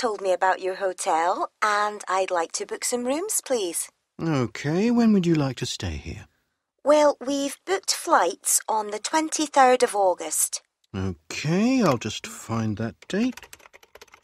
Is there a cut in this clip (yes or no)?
no